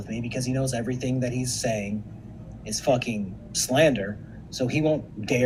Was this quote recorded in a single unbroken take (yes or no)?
yes